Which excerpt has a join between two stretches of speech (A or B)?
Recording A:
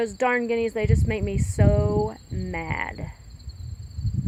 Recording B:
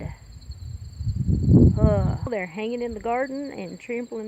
B